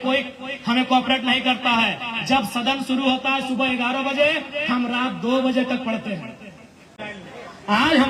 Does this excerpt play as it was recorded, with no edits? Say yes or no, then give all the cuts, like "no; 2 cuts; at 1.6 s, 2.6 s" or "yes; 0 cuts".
no; 1 cut; at 7.1 s